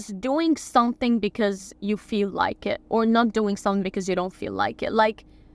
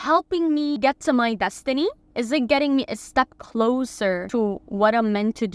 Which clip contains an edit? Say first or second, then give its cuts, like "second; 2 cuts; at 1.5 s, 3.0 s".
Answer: second; 3 cuts; at 0.8 s, 2.0 s, 4.2 s